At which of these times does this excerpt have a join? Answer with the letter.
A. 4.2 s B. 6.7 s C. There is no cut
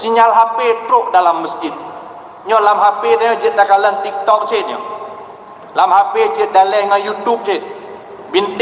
C